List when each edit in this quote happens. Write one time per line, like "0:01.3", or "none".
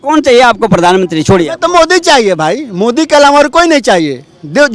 none